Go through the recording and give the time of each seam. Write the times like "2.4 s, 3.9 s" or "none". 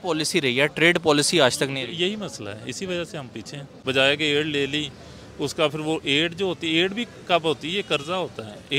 3.6 s